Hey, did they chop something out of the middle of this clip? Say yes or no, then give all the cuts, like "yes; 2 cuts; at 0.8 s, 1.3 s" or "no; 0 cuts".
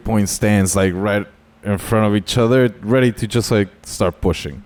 no; 0 cuts